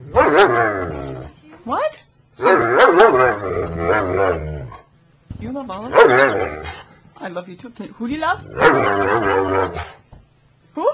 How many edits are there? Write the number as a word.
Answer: one